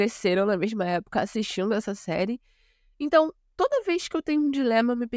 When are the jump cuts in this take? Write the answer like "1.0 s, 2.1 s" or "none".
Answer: none